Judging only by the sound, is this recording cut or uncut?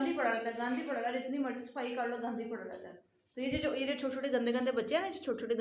uncut